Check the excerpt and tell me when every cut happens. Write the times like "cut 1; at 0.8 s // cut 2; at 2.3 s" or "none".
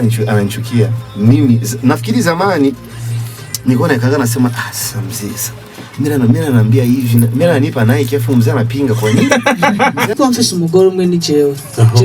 cut 1; at 10.1 s